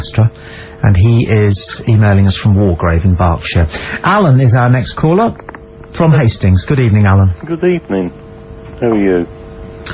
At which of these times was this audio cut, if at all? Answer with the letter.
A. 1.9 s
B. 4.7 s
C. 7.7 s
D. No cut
B